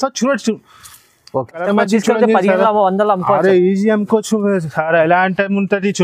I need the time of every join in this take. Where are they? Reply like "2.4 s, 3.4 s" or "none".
1.6 s